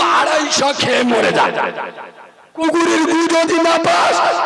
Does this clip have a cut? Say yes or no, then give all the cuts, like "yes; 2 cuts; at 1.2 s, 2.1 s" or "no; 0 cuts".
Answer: no; 0 cuts